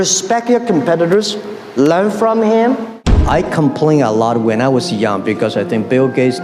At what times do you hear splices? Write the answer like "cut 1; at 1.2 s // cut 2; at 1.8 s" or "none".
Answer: cut 1; at 3.1 s

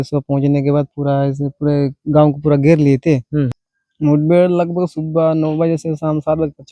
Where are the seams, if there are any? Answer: cut 1; at 3.6 s

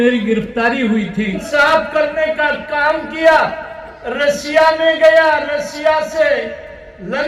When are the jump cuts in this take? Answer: cut 1; at 1.4 s

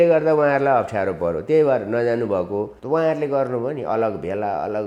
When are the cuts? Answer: cut 1; at 2.8 s

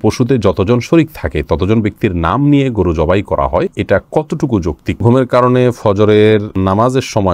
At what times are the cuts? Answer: cut 1; at 3.7 s // cut 2; at 5.0 s // cut 3; at 6.5 s

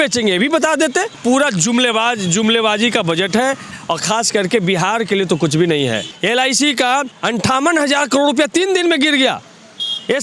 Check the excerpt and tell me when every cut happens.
cut 1; at 1.2 s // cut 2; at 3.7 s // cut 3; at 6.1 s // cut 4; at 7.1 s

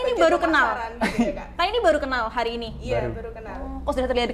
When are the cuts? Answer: none

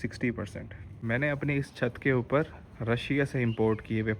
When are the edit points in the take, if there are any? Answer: cut 1; at 1.0 s

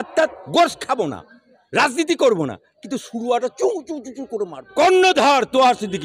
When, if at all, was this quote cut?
cut 1; at 4.6 s

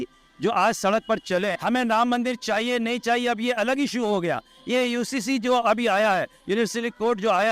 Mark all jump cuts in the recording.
cut 1; at 1.6 s

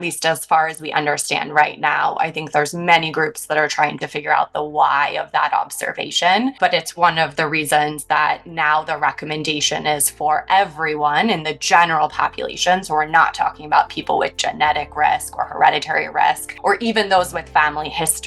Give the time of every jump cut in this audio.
cut 1; at 6.5 s // cut 2; at 16.5 s

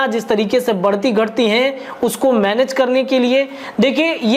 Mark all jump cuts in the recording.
none

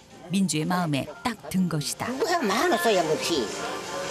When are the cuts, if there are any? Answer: cut 1; at 2.1 s

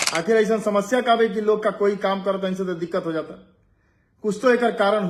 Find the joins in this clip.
none

